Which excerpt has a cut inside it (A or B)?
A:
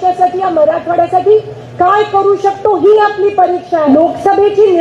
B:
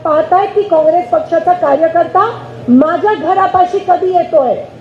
A